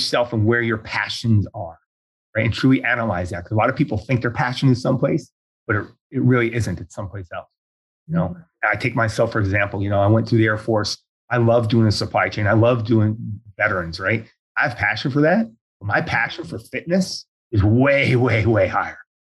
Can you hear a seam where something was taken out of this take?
no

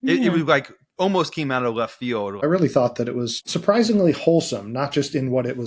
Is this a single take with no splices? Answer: no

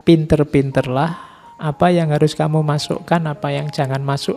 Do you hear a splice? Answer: no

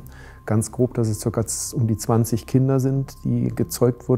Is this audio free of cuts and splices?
yes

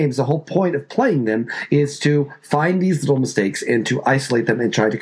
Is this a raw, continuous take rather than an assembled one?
yes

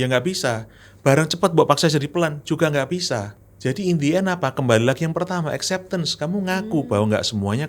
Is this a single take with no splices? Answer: no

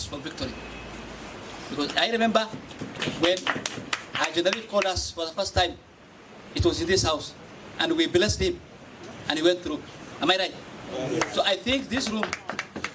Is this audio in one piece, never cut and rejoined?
yes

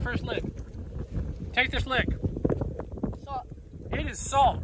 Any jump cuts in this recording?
yes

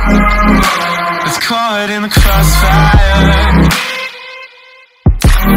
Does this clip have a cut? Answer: yes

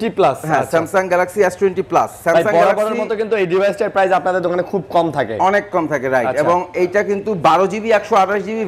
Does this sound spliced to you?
no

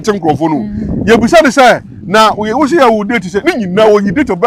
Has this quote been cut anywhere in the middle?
no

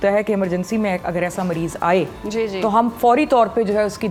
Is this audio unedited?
yes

